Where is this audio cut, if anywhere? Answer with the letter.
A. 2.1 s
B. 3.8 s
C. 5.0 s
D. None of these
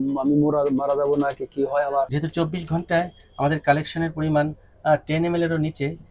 A